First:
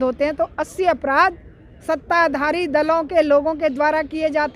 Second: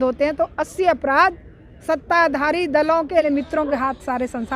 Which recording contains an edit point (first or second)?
second